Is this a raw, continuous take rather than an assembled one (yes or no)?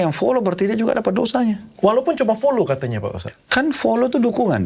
yes